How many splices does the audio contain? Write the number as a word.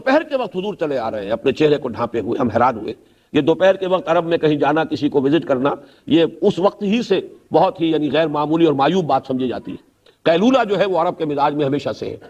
zero